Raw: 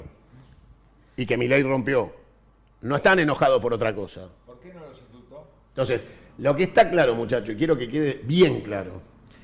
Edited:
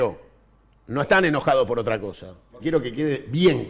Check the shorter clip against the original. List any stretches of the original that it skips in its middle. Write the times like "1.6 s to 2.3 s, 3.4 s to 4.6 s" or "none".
4.5 s to 7.5 s